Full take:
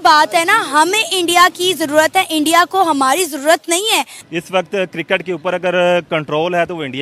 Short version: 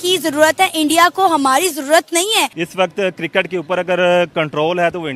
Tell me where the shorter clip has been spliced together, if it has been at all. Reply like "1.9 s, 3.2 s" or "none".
2.6 s